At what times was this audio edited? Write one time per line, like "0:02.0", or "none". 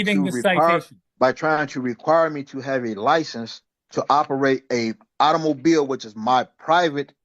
0:01.0